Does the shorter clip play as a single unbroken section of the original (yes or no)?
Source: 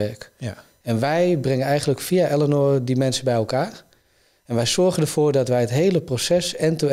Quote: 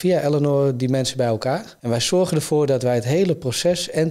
no